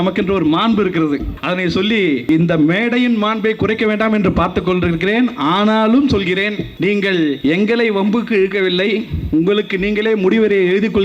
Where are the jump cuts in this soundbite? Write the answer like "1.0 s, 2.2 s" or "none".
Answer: 1.3 s, 2.3 s, 6.7 s, 7.4 s